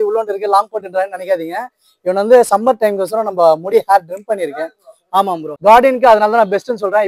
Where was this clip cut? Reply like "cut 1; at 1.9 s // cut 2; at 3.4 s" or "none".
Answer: cut 1; at 5.5 s